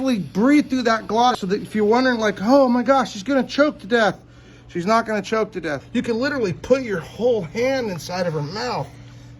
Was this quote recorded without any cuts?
no; 2 cuts; at 1.4 s, 5.8 s

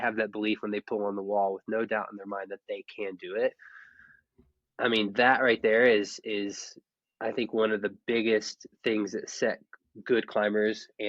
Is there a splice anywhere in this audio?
yes; 1 cut; at 9.9 s

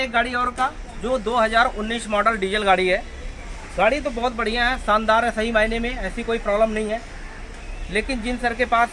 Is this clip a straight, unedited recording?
yes; 0 cuts

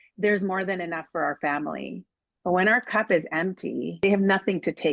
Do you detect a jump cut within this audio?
yes; 1 cut; at 4.0 s

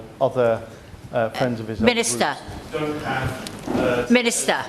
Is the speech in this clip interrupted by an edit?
no; 0 cuts

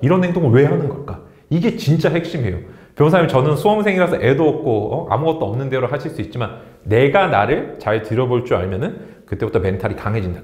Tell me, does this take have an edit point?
no; 0 cuts

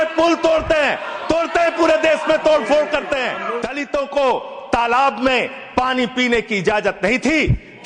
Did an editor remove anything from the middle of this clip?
yes; 1 cut; at 3.5 s

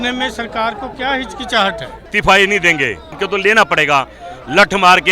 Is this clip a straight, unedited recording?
no; 2 cuts; at 2.1 s, 3.1 s

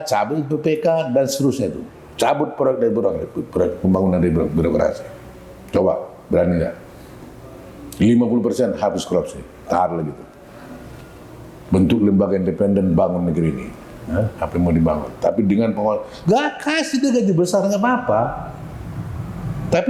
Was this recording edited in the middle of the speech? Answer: no; 0 cuts

